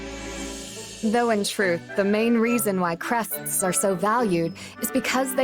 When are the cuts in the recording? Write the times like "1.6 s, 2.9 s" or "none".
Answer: 1.0 s